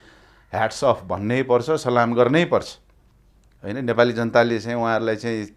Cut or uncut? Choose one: uncut